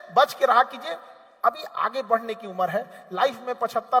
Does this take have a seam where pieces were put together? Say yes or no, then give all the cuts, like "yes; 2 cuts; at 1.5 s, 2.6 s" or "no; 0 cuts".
no; 0 cuts